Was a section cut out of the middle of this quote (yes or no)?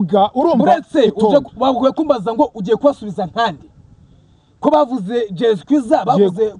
no